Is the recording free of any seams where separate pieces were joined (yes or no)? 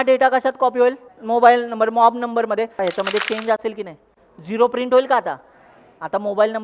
no